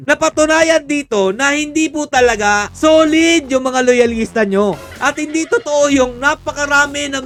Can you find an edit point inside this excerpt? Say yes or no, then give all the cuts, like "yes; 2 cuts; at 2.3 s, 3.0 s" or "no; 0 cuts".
no; 0 cuts